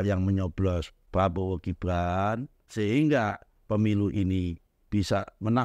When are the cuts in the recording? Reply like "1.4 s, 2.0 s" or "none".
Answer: 0.9 s, 2.6 s